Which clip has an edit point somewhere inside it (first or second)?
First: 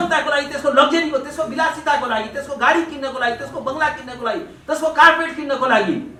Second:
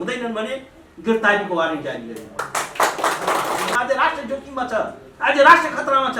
second